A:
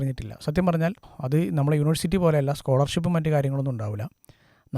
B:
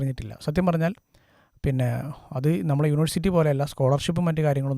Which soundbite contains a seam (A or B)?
A